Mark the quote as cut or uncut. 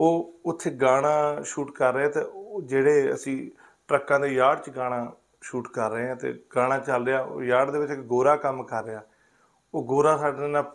uncut